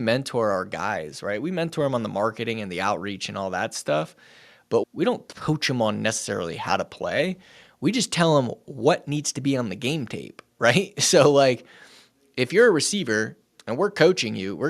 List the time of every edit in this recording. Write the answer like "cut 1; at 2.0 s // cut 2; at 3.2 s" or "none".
cut 1; at 4.8 s